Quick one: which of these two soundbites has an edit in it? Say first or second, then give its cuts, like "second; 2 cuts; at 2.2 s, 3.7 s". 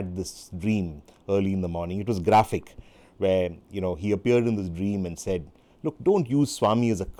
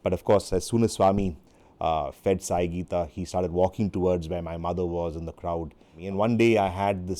second; 1 cut; at 6.0 s